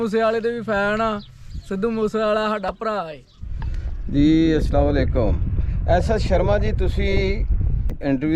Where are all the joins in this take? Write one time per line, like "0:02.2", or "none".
0:03.4